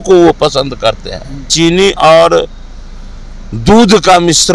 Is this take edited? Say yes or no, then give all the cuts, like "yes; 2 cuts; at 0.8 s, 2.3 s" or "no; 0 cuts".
yes; 1 cut; at 1.5 s